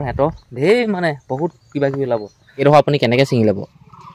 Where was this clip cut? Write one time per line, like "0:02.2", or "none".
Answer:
0:02.6